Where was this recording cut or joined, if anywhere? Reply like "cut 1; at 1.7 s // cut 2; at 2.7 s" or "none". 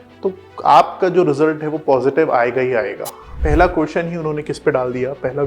cut 1; at 3.3 s